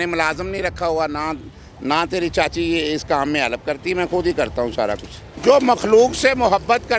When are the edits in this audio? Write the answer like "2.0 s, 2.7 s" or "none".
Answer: 5.2 s